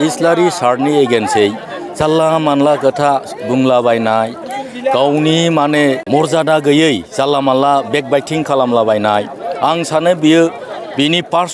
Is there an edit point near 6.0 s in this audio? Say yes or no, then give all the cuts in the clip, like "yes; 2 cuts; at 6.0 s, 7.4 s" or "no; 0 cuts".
yes; 1 cut; at 6.0 s